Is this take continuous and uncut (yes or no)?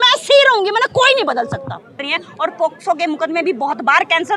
no